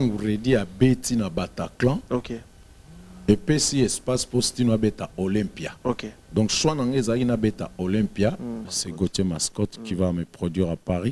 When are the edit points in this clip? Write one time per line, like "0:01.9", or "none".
0:08.7